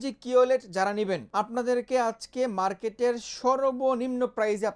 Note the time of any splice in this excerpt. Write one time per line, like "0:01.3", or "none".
0:01.3